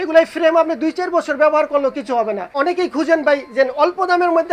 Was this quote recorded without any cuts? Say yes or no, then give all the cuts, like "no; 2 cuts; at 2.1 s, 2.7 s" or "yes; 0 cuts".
no; 1 cut; at 2.4 s